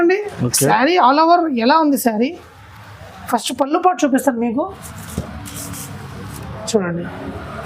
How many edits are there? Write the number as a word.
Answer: zero